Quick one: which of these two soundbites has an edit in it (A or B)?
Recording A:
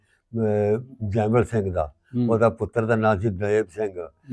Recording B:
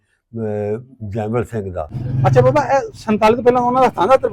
B